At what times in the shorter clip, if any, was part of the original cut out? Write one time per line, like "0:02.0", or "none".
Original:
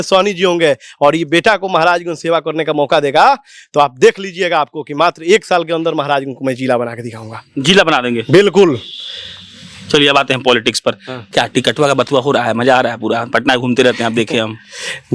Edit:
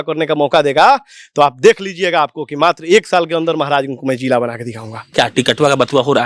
0:04.9